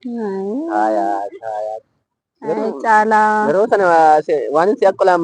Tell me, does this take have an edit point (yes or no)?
no